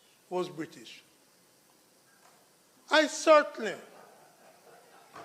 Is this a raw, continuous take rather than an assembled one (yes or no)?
yes